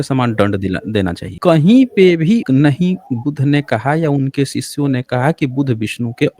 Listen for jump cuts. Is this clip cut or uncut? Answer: cut